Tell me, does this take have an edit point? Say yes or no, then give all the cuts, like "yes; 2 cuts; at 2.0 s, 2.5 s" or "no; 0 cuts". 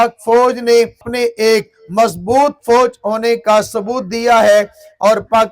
yes; 1 cut; at 1.0 s